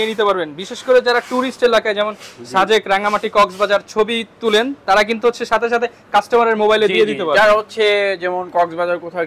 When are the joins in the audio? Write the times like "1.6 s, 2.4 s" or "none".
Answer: none